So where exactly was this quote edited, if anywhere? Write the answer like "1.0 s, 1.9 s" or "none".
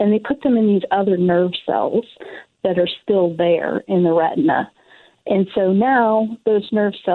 none